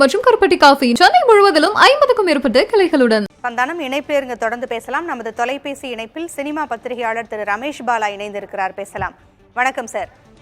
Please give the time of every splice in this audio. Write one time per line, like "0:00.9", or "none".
0:03.3